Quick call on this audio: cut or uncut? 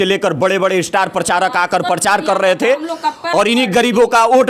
uncut